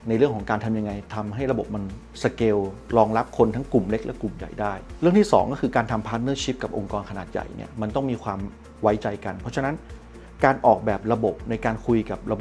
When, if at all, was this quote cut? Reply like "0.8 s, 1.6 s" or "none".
none